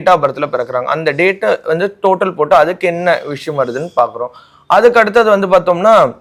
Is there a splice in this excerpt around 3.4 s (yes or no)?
no